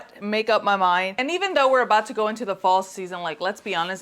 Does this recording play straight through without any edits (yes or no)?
no